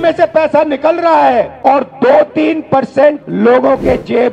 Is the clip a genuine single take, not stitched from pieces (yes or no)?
no